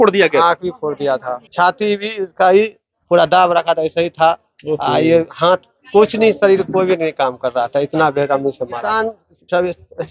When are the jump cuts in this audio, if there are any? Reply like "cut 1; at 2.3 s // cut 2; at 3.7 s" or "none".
cut 1; at 1.4 s // cut 2; at 8.8 s